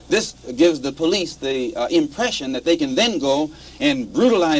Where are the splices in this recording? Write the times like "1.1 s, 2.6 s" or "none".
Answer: 3.6 s